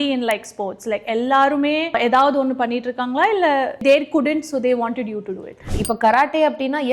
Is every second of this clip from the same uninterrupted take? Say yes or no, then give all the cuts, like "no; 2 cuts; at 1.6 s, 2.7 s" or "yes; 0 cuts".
no; 2 cuts; at 3.8 s, 5.8 s